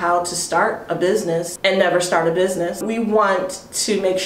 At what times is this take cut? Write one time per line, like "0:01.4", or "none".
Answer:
0:01.5
0:02.8